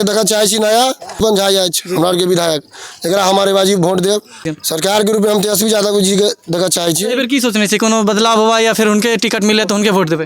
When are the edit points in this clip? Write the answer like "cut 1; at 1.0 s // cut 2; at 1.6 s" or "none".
cut 1; at 1.2 s // cut 2; at 4.5 s // cut 3; at 7.1 s

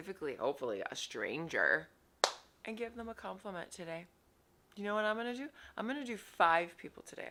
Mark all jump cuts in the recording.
none

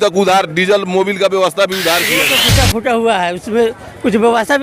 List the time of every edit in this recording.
cut 1; at 2.4 s

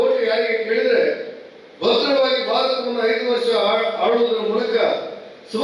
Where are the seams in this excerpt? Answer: none

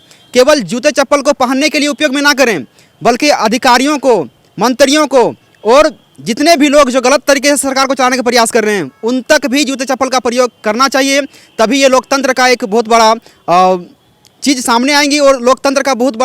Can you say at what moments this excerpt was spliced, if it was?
none

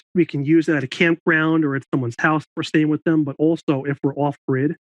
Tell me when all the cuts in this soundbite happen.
none

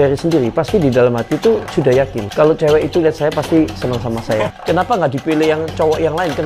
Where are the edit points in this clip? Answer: cut 1; at 2.2 s // cut 2; at 4.5 s

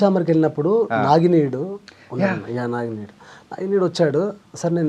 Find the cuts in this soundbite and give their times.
none

